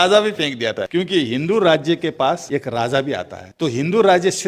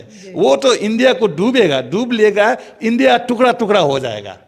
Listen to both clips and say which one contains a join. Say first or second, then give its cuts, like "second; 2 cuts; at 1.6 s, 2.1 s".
first; 3 cuts; at 0.8 s, 2.4 s, 3.4 s